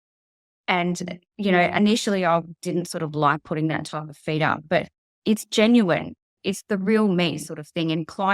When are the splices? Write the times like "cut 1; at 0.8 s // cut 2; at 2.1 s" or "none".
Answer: cut 1; at 5.0 s // cut 2; at 6.3 s